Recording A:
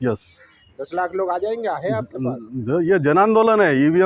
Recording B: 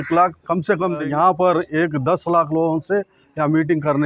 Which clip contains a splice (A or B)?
B